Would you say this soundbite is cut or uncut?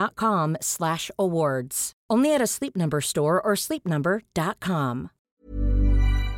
cut